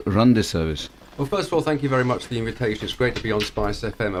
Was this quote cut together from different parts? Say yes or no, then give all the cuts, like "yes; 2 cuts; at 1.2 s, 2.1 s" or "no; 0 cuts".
no; 0 cuts